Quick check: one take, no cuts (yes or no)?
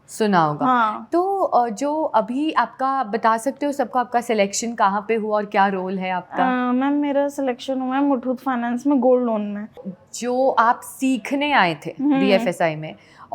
no